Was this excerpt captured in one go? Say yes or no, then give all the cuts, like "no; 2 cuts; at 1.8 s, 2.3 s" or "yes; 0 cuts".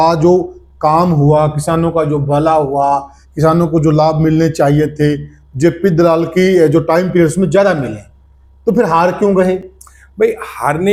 yes; 0 cuts